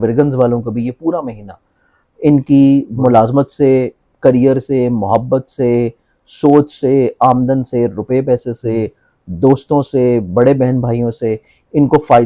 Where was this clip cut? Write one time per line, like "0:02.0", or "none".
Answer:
none